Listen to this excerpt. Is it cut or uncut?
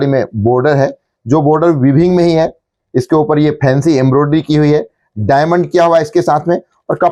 uncut